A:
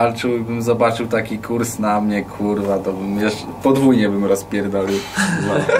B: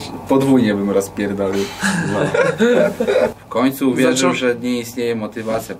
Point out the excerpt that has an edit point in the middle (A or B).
B